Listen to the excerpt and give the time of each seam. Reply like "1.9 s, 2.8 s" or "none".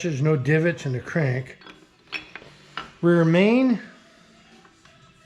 2.0 s